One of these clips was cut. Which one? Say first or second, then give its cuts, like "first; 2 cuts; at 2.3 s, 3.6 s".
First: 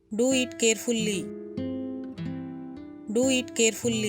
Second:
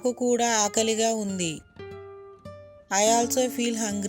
first; 2 cuts; at 1.2 s, 2.5 s